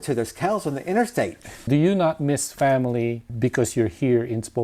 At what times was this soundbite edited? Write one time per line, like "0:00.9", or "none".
0:01.6
0:03.3